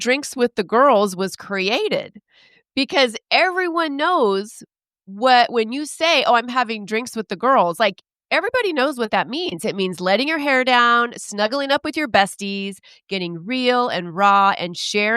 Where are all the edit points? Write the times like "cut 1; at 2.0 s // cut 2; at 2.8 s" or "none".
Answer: none